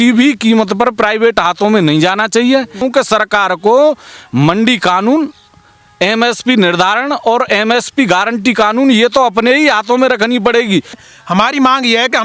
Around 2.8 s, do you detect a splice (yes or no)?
yes